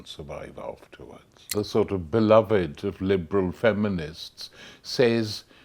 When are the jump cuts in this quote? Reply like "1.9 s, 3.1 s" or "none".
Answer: 1.4 s

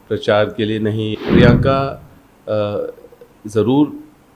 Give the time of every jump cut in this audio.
1.1 s

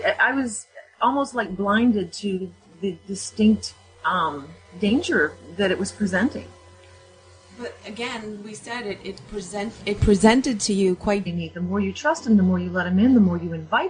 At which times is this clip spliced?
none

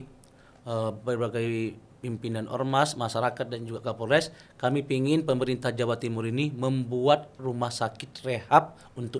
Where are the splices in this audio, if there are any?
none

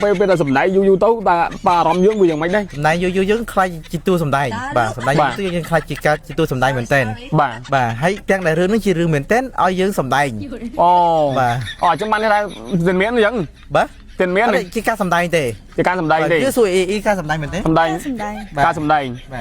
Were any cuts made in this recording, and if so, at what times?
2.7 s, 8.2 s

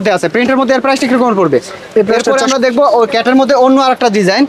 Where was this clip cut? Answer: 2.2 s

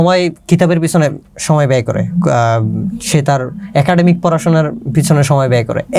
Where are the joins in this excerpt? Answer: none

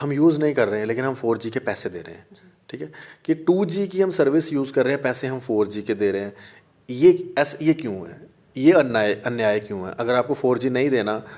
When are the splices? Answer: none

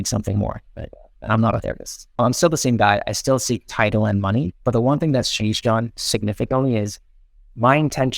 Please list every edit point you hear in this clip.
2.2 s

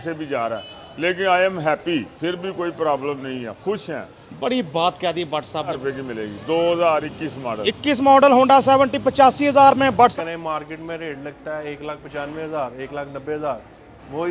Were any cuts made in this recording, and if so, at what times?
5.8 s, 10.1 s

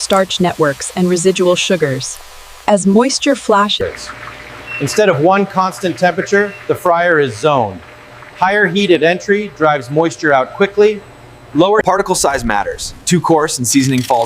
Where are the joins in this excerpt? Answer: 11.8 s

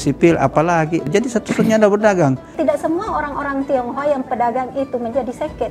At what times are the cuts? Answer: 1.0 s, 2.6 s

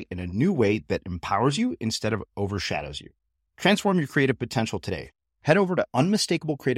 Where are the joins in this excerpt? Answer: none

